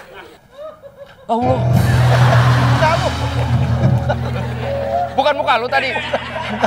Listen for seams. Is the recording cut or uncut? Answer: uncut